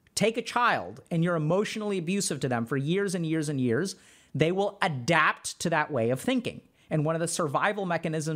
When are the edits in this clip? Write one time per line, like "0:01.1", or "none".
none